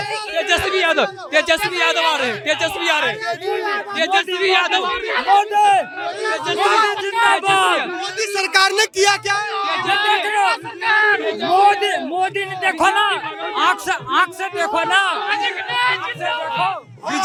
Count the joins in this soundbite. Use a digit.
0